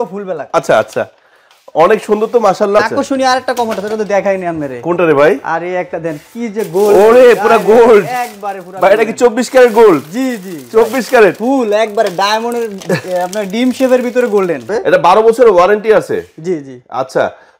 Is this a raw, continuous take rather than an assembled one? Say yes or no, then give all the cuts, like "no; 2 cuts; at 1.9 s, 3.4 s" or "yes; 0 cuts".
no; 2 cuts; at 2.8 s, 14.7 s